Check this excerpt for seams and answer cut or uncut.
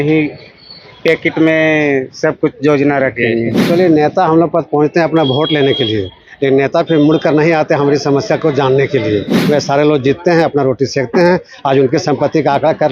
cut